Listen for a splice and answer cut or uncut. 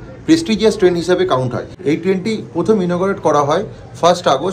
cut